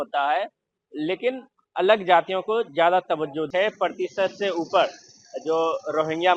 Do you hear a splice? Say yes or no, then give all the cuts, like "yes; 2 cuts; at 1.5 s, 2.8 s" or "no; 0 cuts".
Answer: yes; 1 cut; at 3.5 s